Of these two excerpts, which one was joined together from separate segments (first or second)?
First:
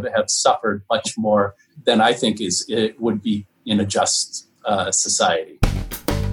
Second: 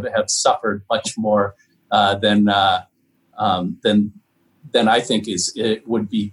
first